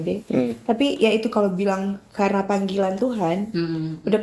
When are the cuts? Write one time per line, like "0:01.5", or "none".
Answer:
none